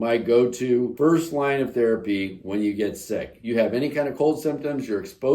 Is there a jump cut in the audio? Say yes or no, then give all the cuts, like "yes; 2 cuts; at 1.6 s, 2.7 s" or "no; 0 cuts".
yes; 1 cut; at 0.9 s